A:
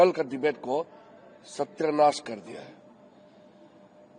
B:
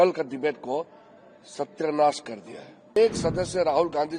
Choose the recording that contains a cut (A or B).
B